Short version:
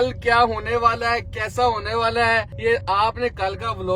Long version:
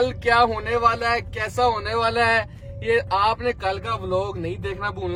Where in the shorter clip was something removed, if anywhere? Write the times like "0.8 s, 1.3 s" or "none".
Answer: 2.5 s